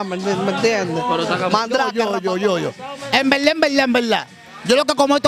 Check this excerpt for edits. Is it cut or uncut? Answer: cut